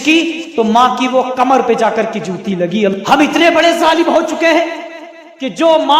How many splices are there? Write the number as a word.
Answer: one